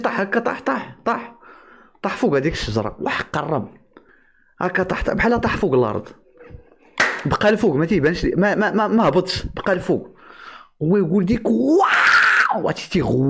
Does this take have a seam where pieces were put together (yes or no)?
no